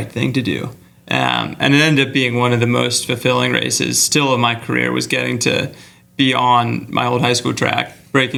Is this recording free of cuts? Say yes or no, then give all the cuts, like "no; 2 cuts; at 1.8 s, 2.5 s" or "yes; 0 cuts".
yes; 0 cuts